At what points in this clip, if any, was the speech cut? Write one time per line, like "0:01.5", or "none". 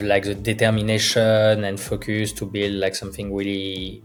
none